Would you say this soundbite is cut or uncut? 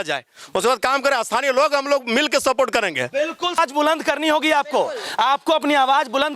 cut